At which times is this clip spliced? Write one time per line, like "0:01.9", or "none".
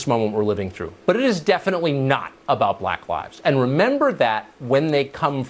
none